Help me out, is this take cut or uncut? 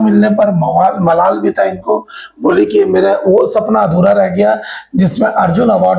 uncut